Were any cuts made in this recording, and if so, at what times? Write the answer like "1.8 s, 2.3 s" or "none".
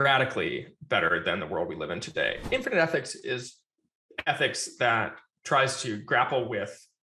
2.4 s